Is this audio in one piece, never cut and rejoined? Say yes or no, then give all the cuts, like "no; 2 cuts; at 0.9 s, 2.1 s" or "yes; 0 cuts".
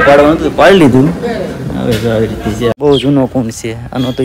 no; 1 cut; at 2.7 s